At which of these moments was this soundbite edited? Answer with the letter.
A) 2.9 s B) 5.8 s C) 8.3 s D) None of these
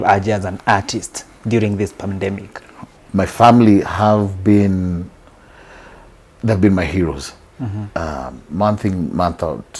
A